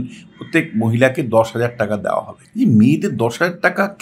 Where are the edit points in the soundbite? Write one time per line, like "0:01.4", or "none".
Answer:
0:02.4

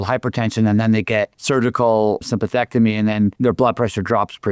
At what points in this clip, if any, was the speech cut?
0:01.4
0:03.3

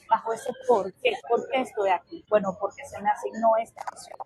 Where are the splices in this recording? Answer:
0:01.2
0:02.1

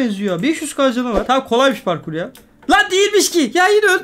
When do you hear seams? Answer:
0:01.2

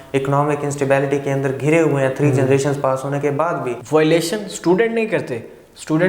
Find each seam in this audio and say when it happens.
0:03.7

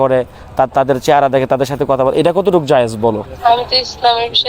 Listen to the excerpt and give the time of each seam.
0:03.3

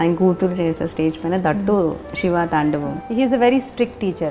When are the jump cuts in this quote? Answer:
0:02.9

